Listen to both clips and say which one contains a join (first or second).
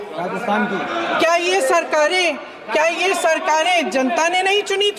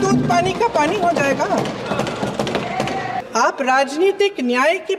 second